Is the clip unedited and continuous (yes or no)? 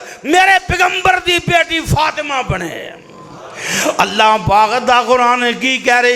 yes